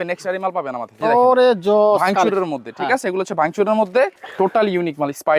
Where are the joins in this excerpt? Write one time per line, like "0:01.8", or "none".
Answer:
0:00.9
0:04.2